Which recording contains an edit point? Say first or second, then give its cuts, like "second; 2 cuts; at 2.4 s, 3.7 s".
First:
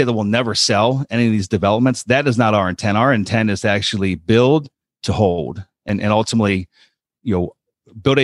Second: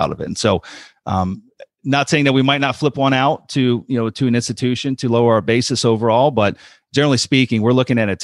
first; 1 cut; at 5.9 s